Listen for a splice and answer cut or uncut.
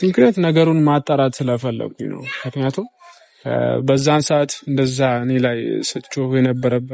uncut